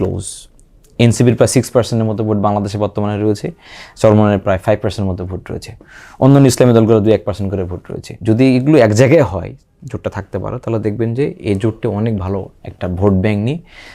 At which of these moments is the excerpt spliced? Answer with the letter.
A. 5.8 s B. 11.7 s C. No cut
C